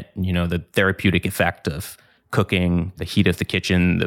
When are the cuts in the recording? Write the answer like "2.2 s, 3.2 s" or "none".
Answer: 3.0 s